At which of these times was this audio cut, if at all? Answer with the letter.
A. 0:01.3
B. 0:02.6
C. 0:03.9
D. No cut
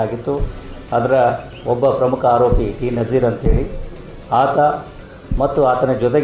D